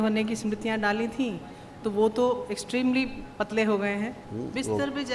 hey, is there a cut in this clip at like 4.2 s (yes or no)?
yes